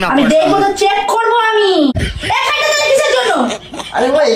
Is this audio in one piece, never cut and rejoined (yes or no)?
no